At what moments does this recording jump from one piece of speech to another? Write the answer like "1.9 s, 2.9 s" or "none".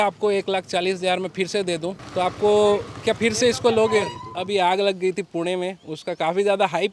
2.0 s, 4.3 s